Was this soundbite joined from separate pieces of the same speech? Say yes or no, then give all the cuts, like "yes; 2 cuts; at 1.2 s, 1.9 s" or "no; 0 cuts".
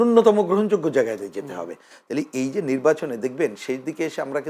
no; 0 cuts